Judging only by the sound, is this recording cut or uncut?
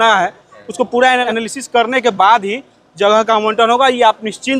cut